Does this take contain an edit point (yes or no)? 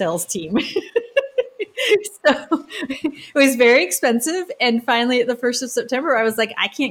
no